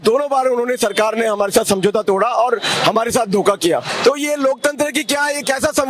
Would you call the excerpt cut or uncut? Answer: cut